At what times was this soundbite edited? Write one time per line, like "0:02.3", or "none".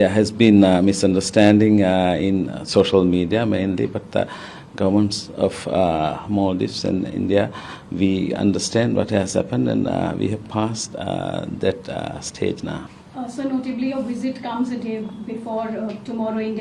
none